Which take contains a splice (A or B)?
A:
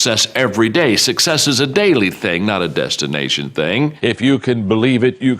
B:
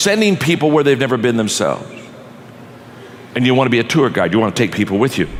A